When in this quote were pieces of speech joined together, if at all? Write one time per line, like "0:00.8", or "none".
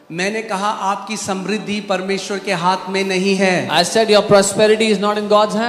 none

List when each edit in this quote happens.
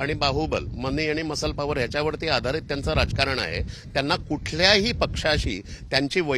none

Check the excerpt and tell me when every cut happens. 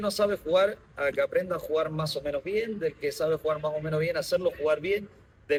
none

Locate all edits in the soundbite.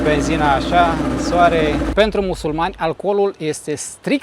0:01.9

